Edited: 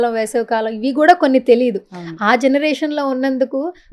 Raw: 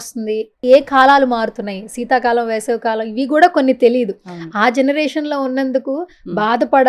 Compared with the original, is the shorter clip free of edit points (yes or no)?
yes